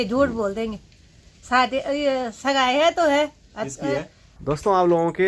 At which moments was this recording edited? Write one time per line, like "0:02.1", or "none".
0:04.2